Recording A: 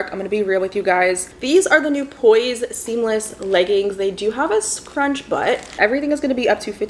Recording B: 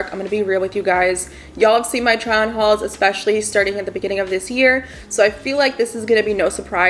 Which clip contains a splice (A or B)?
A